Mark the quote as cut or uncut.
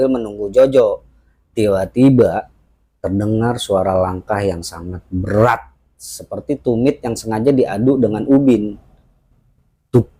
uncut